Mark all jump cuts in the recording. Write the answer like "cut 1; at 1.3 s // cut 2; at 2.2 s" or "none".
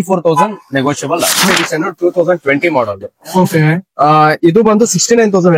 cut 1; at 1.4 s